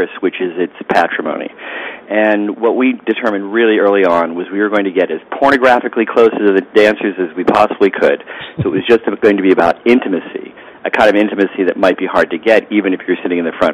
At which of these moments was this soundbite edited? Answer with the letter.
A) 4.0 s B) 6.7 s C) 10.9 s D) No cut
D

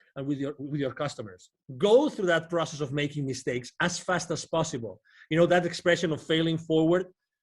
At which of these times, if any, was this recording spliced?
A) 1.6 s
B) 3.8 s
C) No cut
A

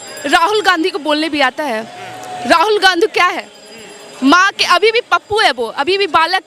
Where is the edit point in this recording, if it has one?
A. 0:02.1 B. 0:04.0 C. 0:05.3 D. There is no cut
D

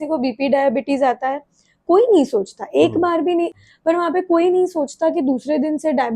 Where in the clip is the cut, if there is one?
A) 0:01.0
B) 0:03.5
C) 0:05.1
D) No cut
B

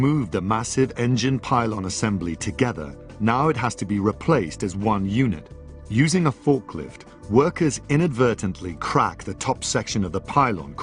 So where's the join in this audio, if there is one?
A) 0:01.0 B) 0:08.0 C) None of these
C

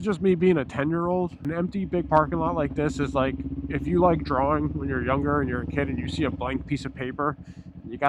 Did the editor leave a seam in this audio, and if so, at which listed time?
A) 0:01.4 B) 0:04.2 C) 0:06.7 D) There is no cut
A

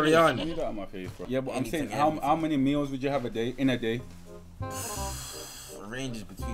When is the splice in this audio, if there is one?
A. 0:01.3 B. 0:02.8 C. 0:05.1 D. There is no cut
A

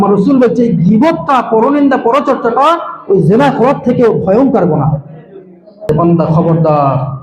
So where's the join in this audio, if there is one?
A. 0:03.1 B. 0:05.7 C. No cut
B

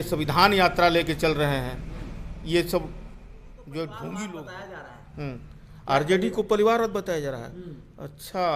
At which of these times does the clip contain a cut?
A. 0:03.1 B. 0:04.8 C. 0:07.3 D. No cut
B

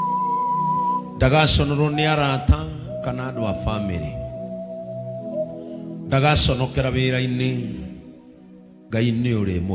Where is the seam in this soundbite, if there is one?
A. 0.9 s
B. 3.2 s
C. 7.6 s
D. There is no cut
A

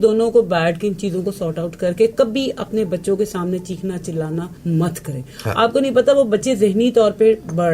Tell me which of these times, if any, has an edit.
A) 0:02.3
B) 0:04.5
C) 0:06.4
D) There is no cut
B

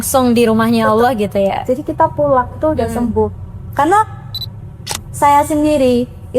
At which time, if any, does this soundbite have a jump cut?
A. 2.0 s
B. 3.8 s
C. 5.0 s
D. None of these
C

